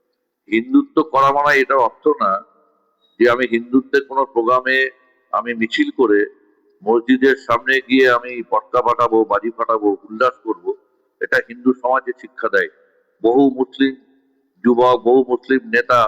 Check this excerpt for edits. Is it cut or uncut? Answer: cut